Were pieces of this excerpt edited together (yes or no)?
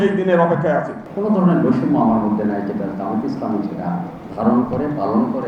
yes